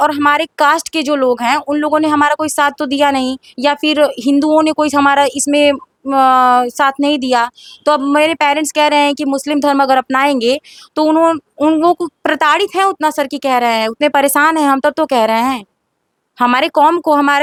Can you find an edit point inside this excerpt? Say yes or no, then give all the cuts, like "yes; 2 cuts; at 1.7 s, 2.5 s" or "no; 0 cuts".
no; 0 cuts